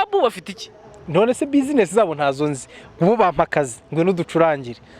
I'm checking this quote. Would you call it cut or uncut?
uncut